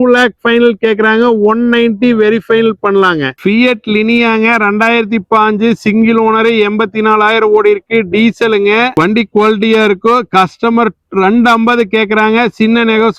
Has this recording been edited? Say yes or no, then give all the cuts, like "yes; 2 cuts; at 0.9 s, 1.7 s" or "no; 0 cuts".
no; 0 cuts